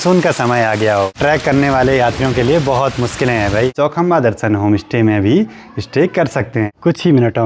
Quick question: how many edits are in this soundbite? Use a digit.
3